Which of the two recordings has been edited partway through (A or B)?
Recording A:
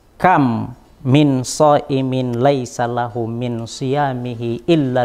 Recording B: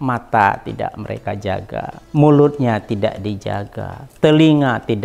B